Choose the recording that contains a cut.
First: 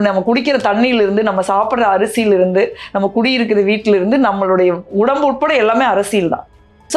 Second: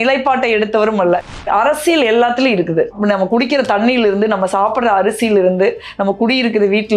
second; 1 cut; at 1.3 s

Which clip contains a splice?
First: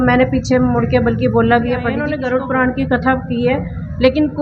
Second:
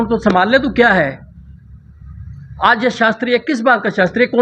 first; 1 cut; at 2.1 s

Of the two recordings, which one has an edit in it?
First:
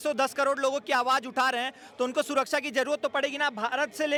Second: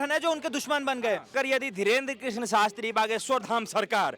second; 1 cut; at 1.3 s

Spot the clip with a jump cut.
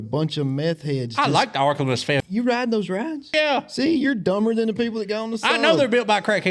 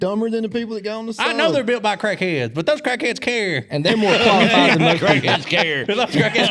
first; 2 cuts; at 2.2 s, 3.3 s

